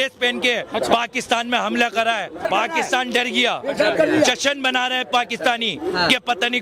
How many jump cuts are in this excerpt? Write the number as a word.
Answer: one